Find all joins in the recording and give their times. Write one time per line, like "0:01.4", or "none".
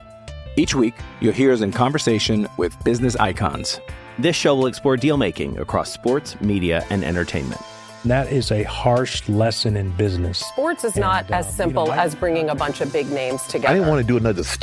none